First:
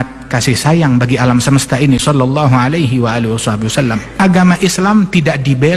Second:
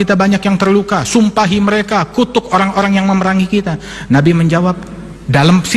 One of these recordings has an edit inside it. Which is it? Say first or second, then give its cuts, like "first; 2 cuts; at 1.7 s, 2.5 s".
first; 1 cut; at 4.1 s